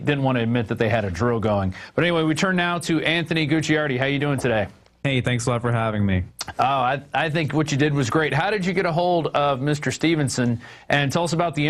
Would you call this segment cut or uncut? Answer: uncut